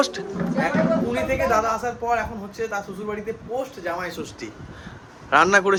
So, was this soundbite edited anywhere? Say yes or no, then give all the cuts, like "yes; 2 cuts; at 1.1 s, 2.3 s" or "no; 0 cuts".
no; 0 cuts